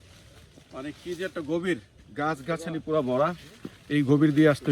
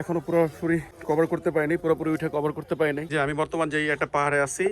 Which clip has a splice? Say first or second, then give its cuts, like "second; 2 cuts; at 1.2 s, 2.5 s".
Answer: second; 2 cuts; at 0.9 s, 3.1 s